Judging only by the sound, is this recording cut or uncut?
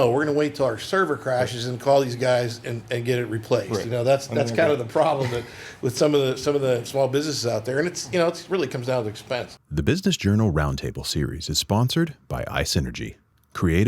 cut